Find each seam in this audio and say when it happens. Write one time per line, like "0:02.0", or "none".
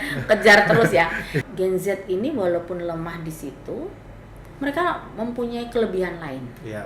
0:01.3